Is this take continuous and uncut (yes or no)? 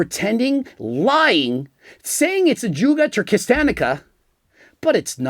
yes